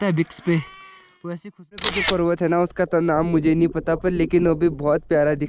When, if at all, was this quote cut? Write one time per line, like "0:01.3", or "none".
0:01.8